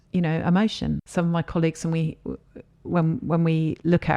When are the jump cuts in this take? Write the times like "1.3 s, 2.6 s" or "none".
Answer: 1.0 s